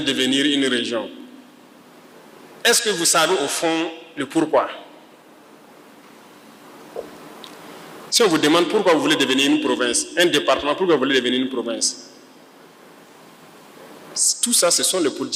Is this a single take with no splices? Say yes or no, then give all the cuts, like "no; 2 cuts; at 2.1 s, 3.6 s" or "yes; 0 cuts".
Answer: yes; 0 cuts